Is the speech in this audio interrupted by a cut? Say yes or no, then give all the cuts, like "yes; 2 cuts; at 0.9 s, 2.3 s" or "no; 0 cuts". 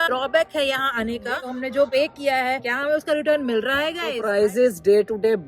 yes; 2 cuts; at 1.3 s, 4.2 s